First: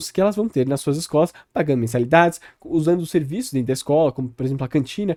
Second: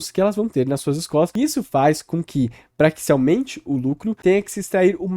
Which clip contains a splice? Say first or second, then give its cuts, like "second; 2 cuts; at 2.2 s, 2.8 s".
second; 1 cut; at 1.3 s